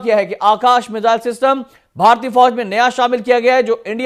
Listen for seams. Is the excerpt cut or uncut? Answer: uncut